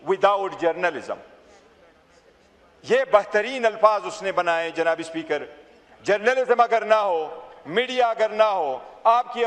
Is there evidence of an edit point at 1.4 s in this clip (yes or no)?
no